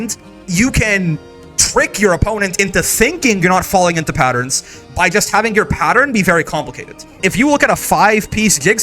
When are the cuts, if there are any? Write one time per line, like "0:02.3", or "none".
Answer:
0:07.2